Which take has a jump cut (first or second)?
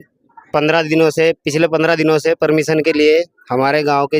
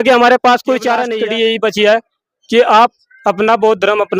second